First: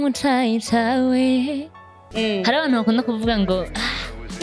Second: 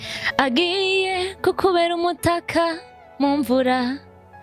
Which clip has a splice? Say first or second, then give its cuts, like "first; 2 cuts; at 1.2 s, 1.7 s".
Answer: first; 1 cut; at 2.0 s